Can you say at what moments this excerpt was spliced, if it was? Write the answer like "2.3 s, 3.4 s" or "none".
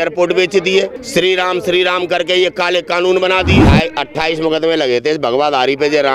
1.0 s, 3.6 s